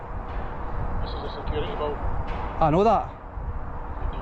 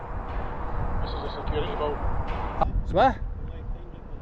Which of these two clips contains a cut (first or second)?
second